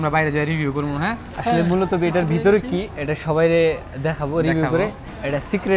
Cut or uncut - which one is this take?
uncut